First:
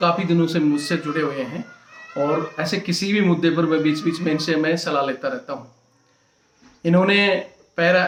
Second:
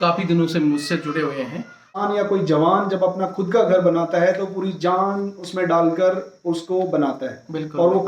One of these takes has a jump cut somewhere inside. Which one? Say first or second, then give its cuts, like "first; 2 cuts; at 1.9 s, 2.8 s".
second; 1 cut; at 2.0 s